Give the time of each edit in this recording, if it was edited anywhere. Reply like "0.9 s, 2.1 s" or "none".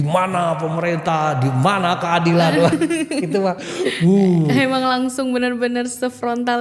none

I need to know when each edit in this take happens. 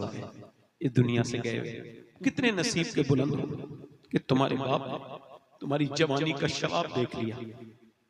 2.1 s

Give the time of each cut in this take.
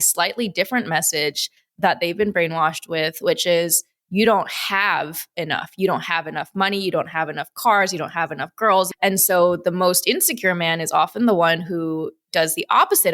8.9 s

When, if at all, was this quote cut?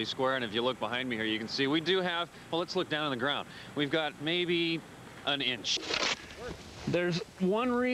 5.8 s

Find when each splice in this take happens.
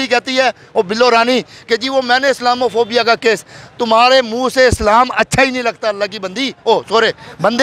none

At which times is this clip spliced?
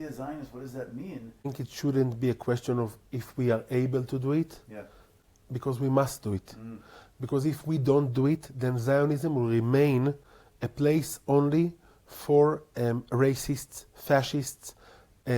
1.5 s

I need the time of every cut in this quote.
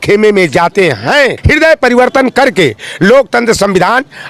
1.4 s

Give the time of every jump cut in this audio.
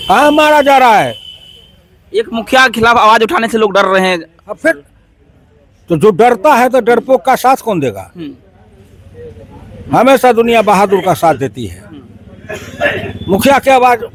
none

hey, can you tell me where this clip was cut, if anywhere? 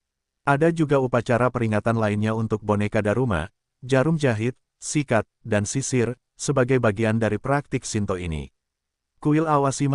9.0 s

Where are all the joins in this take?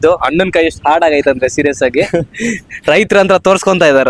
none

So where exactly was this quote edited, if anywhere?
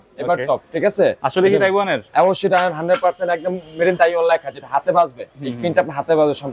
none

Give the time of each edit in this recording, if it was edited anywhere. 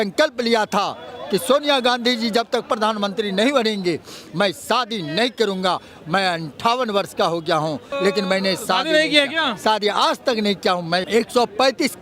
7.9 s, 11.0 s

